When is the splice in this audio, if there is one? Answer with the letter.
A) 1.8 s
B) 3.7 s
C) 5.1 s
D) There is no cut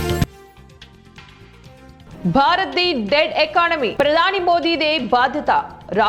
A